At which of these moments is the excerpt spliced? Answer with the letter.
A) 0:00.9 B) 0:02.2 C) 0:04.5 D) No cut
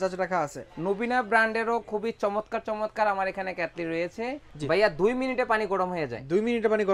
C